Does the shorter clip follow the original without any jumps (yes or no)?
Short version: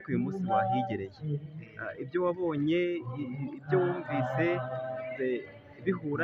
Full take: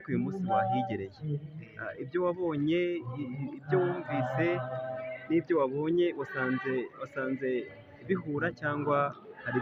no